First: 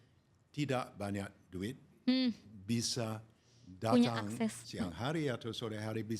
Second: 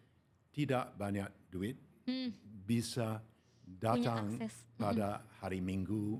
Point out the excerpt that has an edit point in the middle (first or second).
first